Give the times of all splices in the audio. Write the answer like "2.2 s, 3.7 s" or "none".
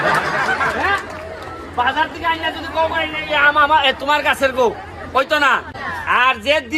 5.9 s

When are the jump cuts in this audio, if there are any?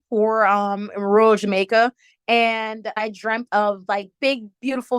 2.9 s

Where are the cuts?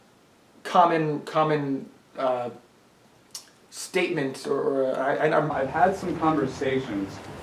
5.5 s

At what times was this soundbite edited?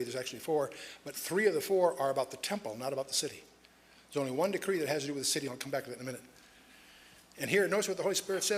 5.1 s

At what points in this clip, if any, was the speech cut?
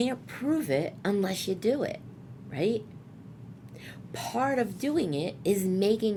none

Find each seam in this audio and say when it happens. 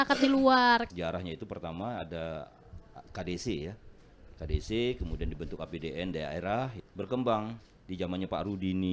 0.9 s, 6.8 s

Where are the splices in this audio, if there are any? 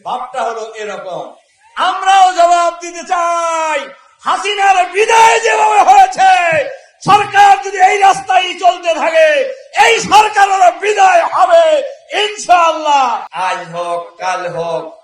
13.3 s

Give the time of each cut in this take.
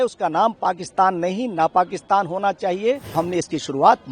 3.1 s

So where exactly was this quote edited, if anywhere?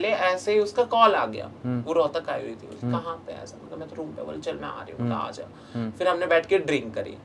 none

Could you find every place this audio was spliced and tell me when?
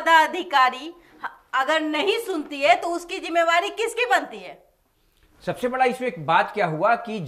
none

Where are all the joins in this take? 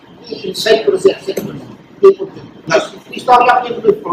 2.5 s

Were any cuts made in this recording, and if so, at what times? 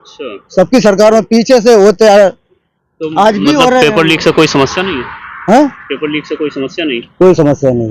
none

